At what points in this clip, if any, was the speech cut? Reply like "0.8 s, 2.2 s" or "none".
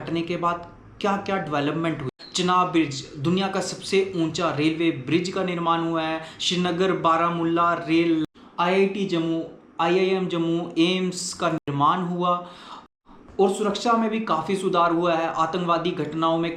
2.2 s, 8.3 s, 13.2 s